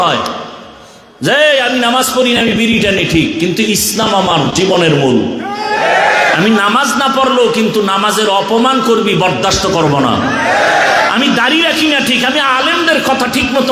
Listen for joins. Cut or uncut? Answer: uncut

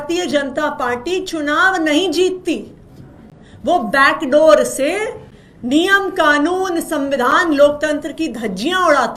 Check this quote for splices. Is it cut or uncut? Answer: uncut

